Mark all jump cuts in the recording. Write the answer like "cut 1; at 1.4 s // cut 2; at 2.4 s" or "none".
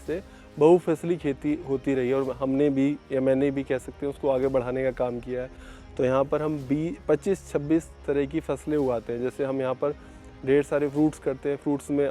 none

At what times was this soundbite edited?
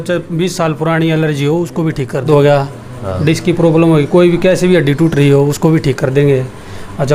cut 1; at 2.3 s

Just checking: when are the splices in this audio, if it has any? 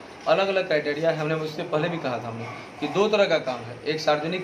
none

